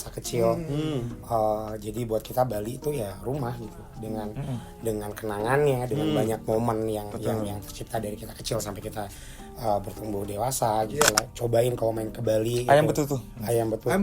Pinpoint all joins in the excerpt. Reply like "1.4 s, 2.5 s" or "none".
11.2 s